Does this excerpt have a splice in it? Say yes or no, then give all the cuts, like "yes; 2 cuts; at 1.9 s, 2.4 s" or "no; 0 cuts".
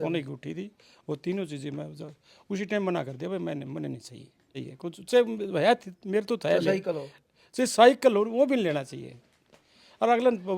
yes; 1 cut; at 4.6 s